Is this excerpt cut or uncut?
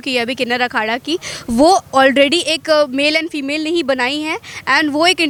uncut